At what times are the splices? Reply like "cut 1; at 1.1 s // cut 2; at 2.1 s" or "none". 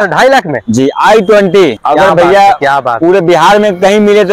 cut 1; at 1.8 s